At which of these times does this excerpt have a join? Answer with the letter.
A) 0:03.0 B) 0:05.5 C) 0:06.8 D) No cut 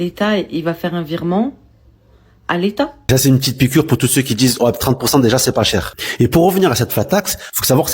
A